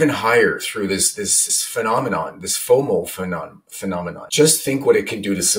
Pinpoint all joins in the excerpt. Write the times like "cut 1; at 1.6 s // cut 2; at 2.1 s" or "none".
cut 1; at 1.4 s // cut 2; at 4.2 s

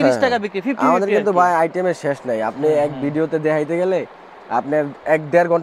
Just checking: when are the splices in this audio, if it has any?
none

